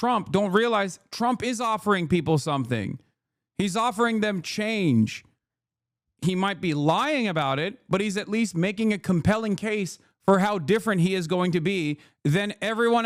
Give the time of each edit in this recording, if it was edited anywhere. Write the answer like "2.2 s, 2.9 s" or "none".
none